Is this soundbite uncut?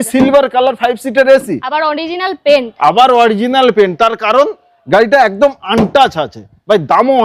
yes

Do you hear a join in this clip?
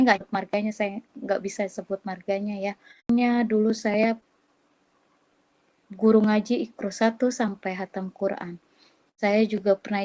yes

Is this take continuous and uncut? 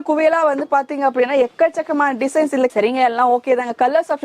yes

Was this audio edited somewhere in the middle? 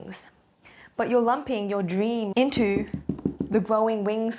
yes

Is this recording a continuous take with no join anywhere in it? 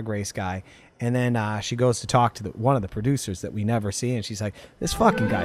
yes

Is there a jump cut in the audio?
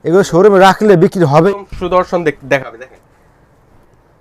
yes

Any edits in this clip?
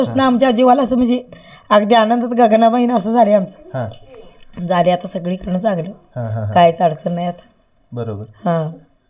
no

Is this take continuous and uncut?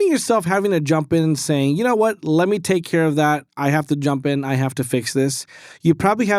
yes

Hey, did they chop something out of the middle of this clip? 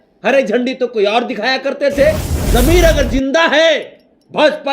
yes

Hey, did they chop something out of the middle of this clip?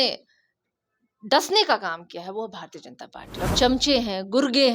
yes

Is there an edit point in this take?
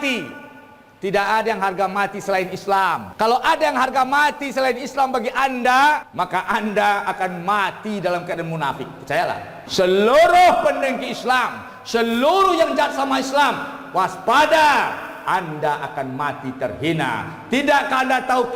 yes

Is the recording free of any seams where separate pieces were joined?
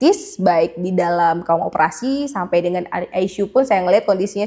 yes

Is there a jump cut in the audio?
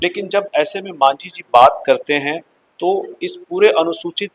no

